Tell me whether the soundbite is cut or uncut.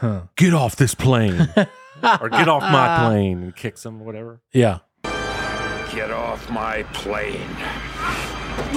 uncut